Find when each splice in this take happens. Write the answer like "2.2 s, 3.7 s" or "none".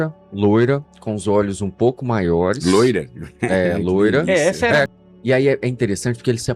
4.9 s